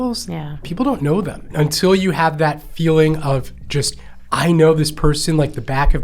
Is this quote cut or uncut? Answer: cut